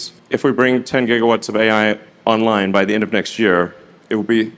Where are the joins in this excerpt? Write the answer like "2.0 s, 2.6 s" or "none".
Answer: 2.1 s